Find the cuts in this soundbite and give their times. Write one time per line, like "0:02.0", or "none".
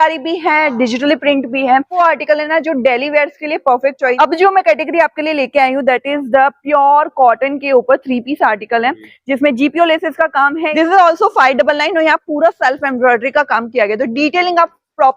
0:02.0
0:04.1
0:10.7